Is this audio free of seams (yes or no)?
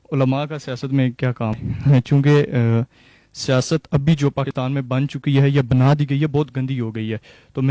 no